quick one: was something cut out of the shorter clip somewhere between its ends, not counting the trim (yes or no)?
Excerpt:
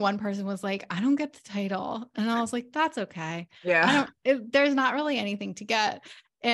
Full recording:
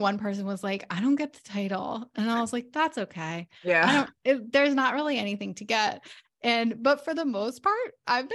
no